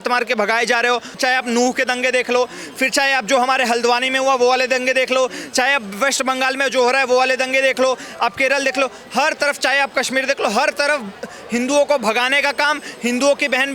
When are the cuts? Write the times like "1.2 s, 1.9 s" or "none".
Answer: 1.1 s

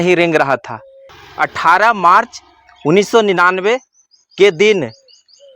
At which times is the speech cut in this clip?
1.2 s

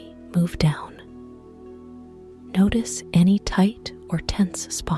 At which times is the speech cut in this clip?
0.9 s, 2.5 s

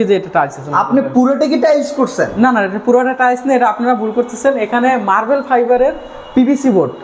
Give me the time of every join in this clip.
none

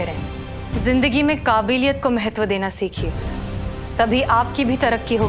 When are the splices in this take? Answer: none

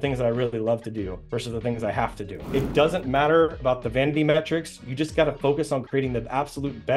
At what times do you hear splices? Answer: 2.4 s

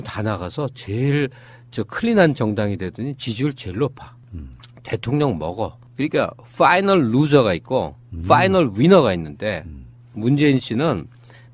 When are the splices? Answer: 6.4 s

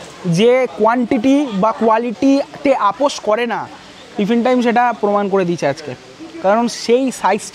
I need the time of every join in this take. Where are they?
none

